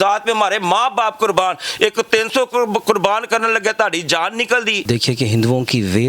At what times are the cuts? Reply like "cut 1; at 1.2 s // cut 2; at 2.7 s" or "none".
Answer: cut 1; at 4.8 s